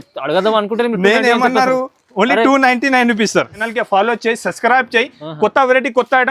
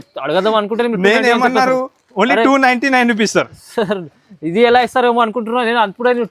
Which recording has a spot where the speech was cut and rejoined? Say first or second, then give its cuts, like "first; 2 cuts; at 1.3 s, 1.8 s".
first; 1 cut; at 3.6 s